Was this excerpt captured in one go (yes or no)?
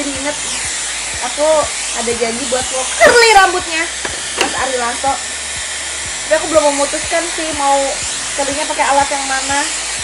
yes